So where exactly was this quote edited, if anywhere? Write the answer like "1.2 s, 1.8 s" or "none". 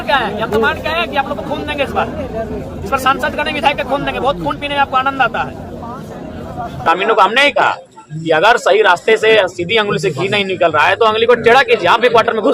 6.9 s

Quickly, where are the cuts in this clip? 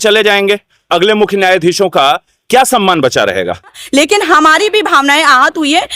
3.8 s

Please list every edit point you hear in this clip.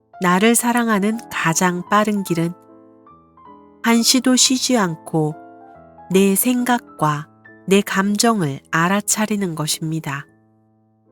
10.2 s

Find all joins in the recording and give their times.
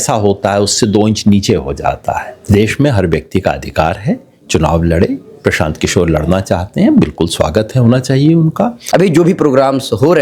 2.4 s, 8.8 s

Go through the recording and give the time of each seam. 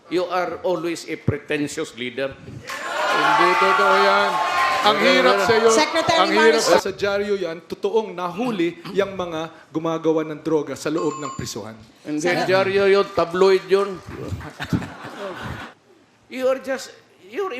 6.6 s, 15.7 s

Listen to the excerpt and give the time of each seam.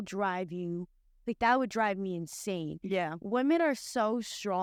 none

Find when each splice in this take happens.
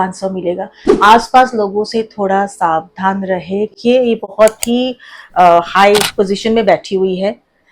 3.8 s

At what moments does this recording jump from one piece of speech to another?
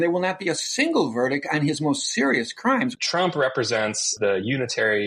3.0 s, 4.1 s

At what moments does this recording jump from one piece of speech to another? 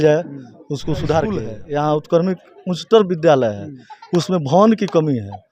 1.6 s

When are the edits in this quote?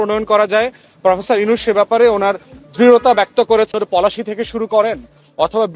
3.7 s

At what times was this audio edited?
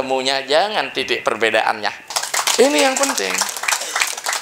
2.1 s

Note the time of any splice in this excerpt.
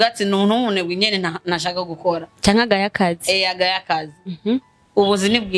none

